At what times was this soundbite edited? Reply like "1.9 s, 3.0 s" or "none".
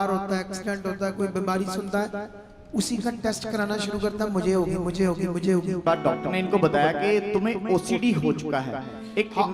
5.8 s